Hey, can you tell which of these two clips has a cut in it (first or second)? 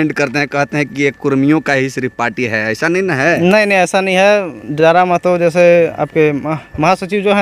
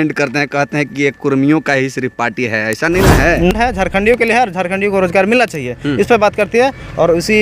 second